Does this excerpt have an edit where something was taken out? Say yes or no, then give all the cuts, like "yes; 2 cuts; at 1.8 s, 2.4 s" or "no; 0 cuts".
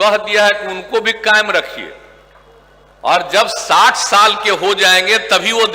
no; 0 cuts